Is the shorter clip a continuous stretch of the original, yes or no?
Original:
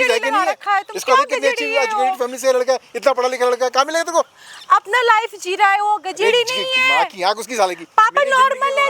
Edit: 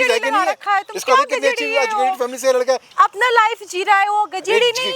no